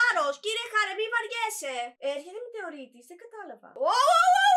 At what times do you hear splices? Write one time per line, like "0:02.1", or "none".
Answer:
0:01.9
0:03.7